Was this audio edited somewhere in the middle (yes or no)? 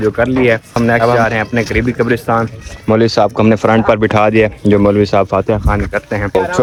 no